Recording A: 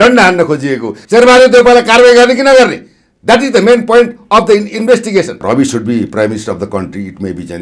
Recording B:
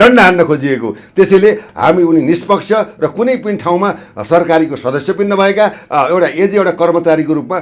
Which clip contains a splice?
A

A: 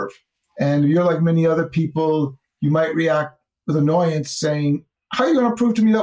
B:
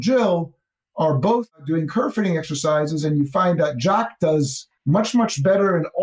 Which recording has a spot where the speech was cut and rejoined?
A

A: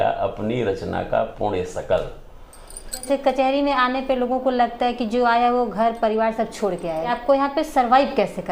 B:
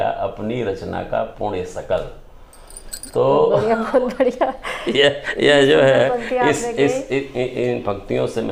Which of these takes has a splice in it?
A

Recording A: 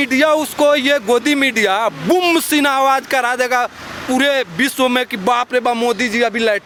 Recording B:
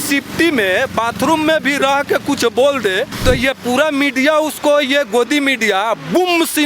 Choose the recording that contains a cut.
B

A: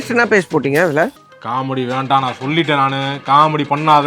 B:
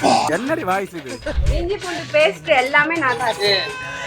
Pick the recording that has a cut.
B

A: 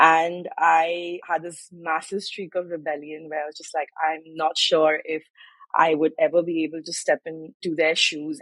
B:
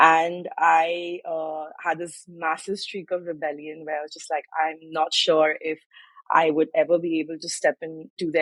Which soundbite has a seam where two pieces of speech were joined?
A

